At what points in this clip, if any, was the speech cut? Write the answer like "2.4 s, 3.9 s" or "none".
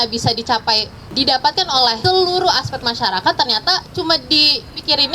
1.1 s